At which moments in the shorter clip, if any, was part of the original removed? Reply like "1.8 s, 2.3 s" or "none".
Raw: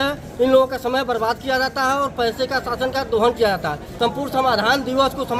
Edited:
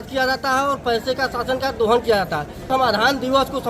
2.6 s